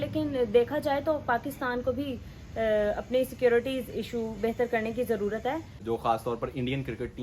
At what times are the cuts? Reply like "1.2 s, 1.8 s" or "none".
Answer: 5.7 s